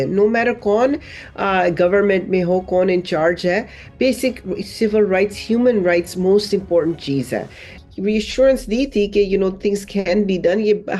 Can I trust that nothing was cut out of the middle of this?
no; 1 cut; at 7.8 s

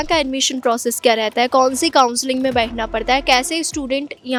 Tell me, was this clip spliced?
no; 0 cuts

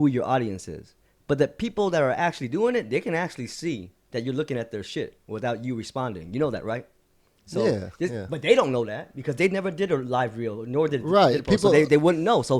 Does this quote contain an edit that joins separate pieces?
no; 0 cuts

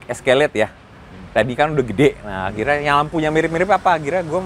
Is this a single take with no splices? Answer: yes; 0 cuts

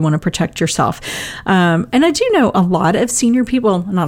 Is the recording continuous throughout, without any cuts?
yes; 0 cuts

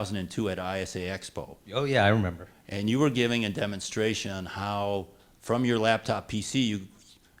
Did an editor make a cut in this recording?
no; 0 cuts

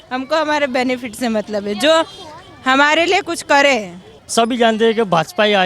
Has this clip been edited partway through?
yes; 1 cut; at 4.2 s

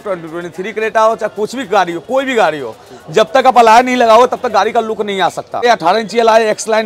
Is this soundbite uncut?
no; 1 cut; at 5.6 s

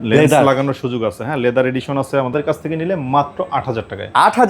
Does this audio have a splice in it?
yes; 1 cut; at 2.3 s

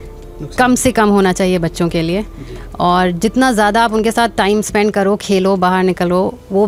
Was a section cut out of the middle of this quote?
no; 0 cuts

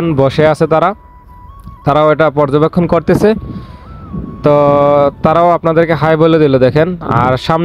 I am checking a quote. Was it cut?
no; 0 cuts

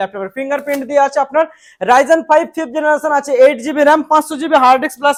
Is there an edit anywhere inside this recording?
no; 0 cuts

